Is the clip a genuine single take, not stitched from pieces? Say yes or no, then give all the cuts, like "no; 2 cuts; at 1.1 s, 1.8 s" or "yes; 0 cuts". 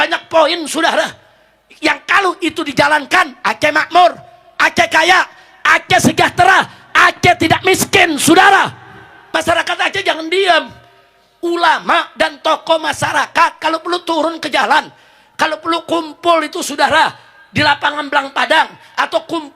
no; 1 cut; at 9.2 s